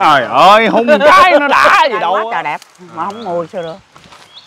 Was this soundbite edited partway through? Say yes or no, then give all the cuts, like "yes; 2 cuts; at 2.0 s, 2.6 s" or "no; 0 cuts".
yes; 1 cut; at 2.2 s